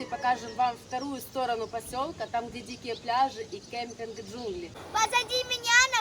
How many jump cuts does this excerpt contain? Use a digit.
1